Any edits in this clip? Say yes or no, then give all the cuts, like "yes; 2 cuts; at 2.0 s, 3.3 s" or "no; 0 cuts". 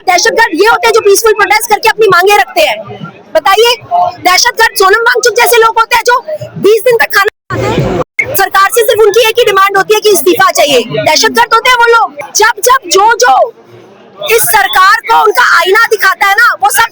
yes; 1 cut; at 12.2 s